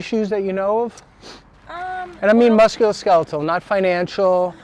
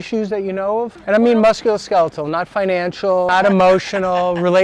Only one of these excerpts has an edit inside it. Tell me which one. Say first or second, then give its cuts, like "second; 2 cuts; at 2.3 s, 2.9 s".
second; 2 cuts; at 1.0 s, 3.3 s